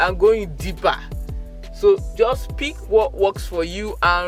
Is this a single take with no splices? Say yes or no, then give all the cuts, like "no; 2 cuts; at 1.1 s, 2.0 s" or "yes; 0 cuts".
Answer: yes; 0 cuts